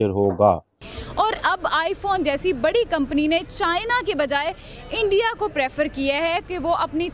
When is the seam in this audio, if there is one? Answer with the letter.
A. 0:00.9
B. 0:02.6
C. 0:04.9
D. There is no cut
A